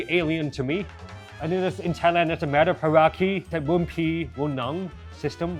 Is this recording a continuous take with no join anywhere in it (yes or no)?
no